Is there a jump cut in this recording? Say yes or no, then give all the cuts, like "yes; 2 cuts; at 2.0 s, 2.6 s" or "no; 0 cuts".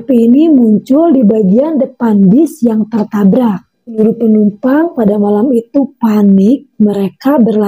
yes; 1 cut; at 3.8 s